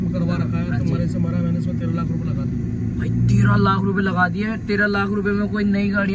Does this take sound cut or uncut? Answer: uncut